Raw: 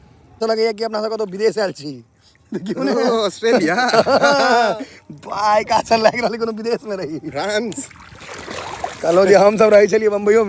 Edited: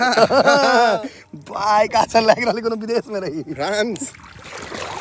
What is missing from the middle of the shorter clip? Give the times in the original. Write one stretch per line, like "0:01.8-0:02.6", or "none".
none